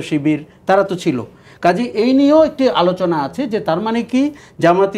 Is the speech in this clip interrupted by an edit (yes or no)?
no